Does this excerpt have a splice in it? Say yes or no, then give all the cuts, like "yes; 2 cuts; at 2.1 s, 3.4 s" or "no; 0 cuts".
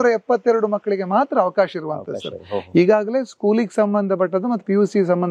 no; 0 cuts